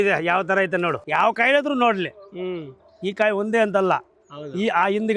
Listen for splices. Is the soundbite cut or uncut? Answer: cut